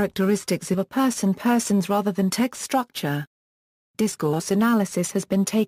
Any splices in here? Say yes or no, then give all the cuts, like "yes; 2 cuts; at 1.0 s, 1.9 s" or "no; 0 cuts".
yes; 1 cut; at 4.0 s